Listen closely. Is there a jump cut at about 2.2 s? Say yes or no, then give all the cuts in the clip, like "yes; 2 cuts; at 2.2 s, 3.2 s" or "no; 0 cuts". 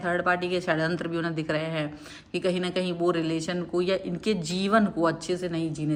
no; 0 cuts